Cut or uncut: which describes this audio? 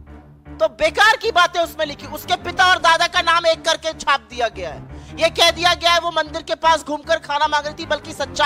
uncut